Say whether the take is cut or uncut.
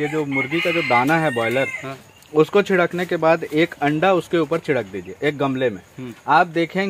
uncut